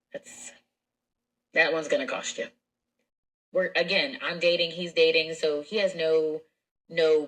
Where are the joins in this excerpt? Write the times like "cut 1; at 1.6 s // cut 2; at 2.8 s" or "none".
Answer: cut 1; at 3.1 s